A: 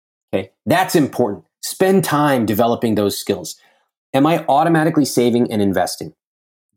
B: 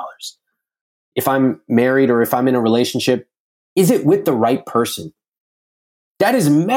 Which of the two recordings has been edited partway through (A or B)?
B